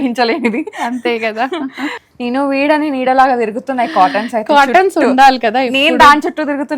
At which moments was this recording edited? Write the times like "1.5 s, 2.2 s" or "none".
2.0 s